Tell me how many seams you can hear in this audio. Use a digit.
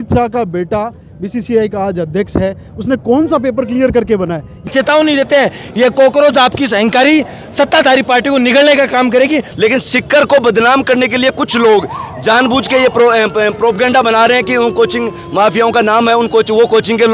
2